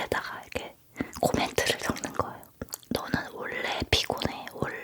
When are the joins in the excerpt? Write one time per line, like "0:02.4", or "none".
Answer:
0:02.7